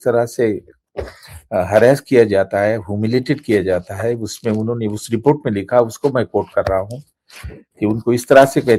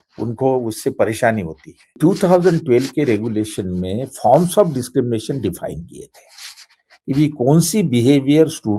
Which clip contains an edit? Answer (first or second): second